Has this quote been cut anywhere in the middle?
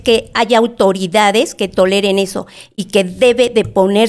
no; 0 cuts

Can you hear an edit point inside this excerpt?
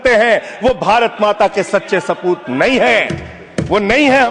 no; 0 cuts

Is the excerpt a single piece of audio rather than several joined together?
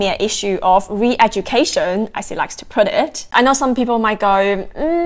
no; 1 cut; at 3.2 s

